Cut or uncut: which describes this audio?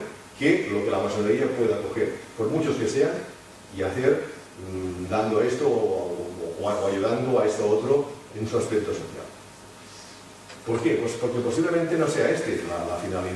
uncut